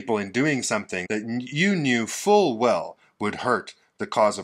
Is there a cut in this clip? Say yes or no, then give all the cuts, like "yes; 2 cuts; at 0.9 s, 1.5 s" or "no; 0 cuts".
yes; 1 cut; at 1.0 s